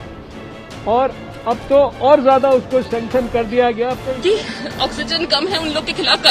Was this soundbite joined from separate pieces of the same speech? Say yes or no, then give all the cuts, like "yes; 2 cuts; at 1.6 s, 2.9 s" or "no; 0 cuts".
yes; 1 cut; at 4.0 s